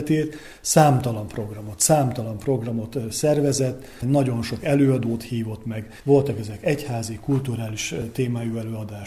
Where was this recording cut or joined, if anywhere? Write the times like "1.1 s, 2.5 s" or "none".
none